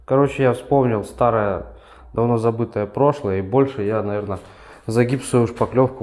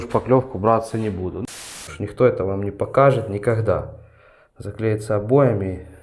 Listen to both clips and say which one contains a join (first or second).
second